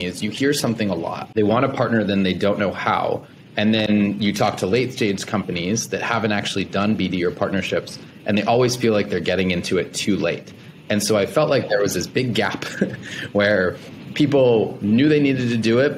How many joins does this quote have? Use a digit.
1